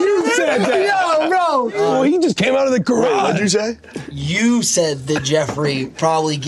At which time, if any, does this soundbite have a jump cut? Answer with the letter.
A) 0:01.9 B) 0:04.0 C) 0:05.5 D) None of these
A